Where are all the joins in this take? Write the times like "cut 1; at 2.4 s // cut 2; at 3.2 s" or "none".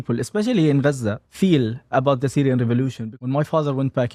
cut 1; at 1.2 s // cut 2; at 3.0 s